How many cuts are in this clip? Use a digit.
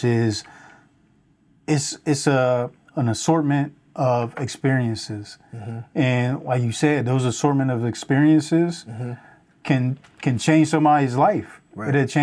0